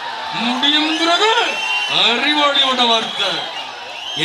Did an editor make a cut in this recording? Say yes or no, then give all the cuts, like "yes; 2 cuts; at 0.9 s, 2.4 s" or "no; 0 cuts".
no; 0 cuts